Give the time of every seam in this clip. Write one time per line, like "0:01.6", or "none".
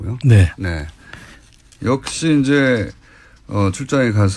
none

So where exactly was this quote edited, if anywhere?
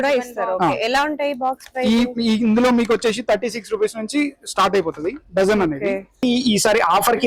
0:06.2

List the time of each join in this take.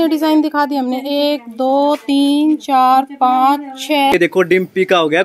0:04.1

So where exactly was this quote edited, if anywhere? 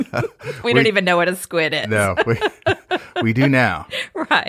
none

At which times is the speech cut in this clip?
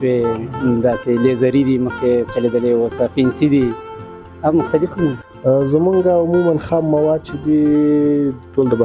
0:05.2

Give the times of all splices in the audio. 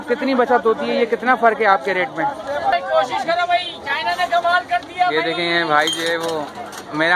0:02.7

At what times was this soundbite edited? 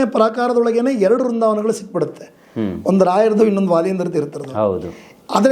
none

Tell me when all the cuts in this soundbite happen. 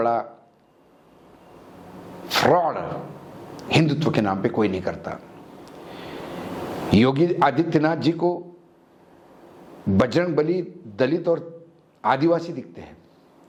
none

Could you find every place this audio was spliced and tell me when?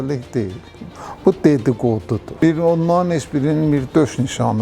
0:02.3

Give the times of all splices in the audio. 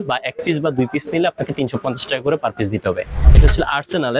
0:03.2

